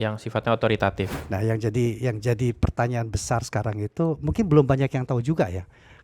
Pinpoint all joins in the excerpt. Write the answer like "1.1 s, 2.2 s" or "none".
1.1 s